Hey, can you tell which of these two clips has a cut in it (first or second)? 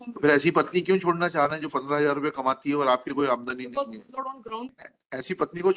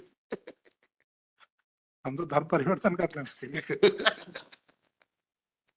first